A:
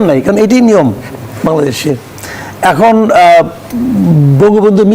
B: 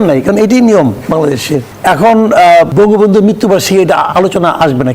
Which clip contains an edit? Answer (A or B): B